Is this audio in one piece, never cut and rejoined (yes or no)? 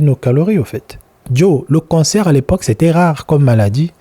no